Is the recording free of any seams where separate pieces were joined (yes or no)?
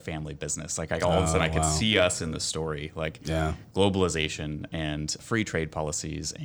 yes